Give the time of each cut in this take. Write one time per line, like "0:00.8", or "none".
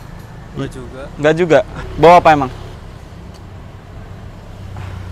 0:01.8
0:02.7